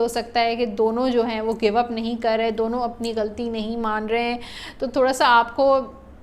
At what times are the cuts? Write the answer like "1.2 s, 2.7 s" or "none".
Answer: none